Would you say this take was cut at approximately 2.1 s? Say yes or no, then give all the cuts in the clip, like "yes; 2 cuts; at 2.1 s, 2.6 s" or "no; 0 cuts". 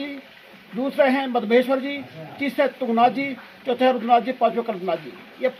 no; 0 cuts